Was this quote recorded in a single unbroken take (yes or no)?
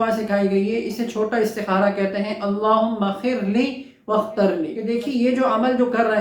no